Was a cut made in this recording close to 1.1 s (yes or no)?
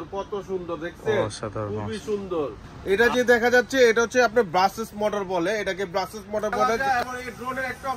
no